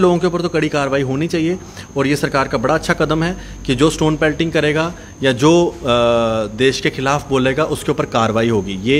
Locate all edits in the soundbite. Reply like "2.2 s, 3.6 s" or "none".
none